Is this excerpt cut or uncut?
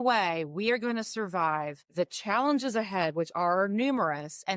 cut